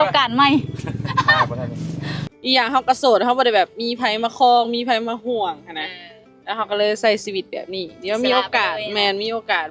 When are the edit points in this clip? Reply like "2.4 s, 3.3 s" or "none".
2.2 s